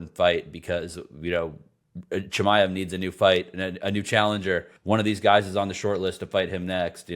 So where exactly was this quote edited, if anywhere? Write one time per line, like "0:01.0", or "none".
0:04.7